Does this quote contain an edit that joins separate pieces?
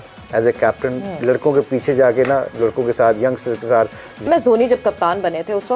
yes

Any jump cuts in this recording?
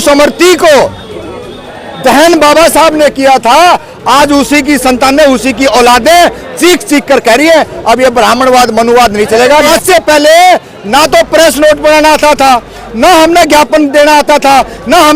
yes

